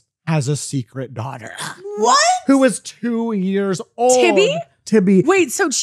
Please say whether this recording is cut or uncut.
uncut